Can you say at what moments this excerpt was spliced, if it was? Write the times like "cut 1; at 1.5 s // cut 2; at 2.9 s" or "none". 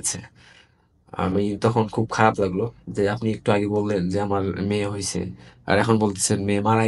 none